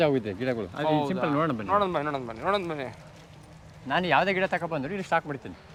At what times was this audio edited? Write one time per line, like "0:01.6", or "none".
none